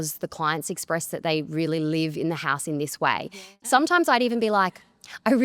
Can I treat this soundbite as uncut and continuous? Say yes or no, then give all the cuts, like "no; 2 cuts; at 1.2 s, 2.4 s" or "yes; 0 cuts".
no; 1 cut; at 3.5 s